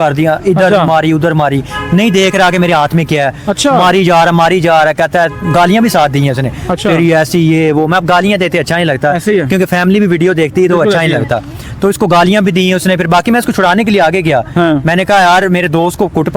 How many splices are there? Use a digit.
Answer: 0